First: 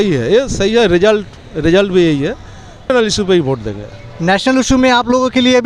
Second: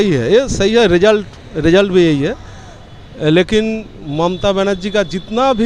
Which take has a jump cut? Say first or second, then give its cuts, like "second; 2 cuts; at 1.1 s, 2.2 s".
first; 1 cut; at 2.9 s